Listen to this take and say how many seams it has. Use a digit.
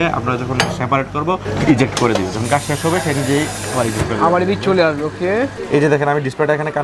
2